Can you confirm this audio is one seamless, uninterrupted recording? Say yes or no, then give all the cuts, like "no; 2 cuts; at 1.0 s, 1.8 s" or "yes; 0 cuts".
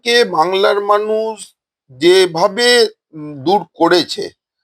yes; 0 cuts